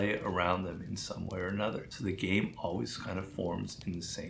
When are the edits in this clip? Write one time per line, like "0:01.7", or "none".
0:01.9